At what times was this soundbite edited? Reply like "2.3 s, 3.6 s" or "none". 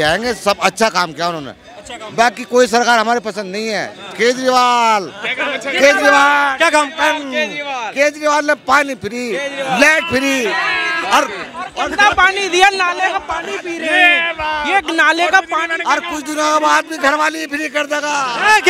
none